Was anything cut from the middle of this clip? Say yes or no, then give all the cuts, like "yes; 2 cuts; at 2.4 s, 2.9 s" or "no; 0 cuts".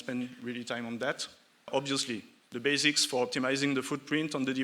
yes; 1 cut; at 1.7 s